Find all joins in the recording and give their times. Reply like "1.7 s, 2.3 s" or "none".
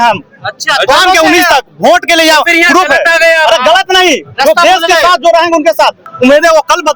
6.1 s